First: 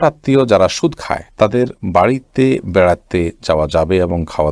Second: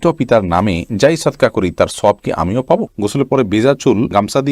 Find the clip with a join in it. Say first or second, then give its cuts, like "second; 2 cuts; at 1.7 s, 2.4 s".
second; 1 cut; at 3.0 s